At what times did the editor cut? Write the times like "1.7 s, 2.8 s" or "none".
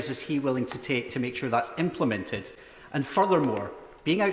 none